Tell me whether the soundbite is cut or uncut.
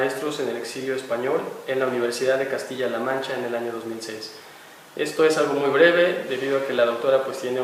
uncut